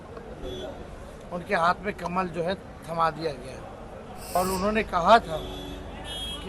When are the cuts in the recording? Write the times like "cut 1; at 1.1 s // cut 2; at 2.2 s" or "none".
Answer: cut 1; at 4.4 s